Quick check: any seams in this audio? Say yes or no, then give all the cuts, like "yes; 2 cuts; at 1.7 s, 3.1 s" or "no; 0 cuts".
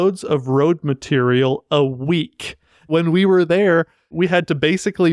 yes; 2 cuts; at 2.9 s, 4.1 s